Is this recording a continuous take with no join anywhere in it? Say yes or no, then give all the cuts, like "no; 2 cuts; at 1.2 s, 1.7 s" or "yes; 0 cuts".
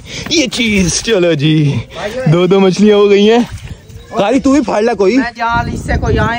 yes; 0 cuts